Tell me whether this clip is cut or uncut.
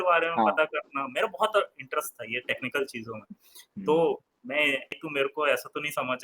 cut